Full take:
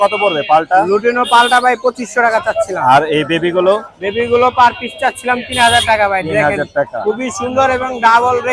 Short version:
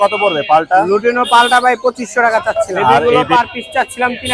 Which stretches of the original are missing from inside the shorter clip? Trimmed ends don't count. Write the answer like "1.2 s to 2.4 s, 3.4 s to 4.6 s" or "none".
3.0 s to 4.3 s